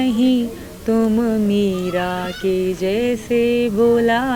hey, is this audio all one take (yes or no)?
yes